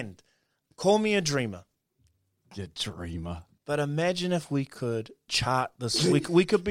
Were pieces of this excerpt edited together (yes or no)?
yes